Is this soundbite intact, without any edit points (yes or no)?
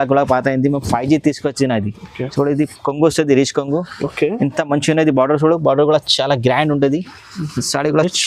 yes